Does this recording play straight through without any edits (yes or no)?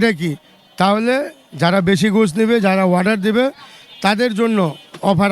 yes